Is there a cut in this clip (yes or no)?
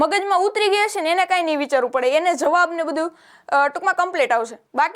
no